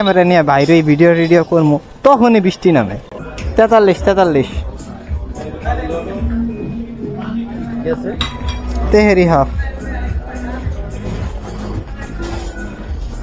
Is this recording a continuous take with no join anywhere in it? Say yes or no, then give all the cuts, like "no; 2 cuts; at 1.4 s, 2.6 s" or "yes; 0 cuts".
yes; 0 cuts